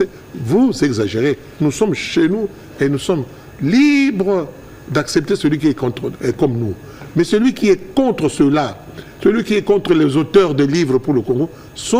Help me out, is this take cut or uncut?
uncut